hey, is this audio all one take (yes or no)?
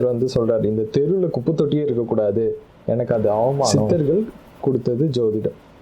no